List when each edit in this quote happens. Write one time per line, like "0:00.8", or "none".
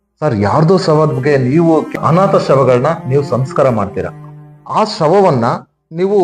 0:01.9